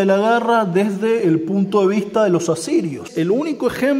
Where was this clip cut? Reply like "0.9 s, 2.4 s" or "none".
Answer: 3.0 s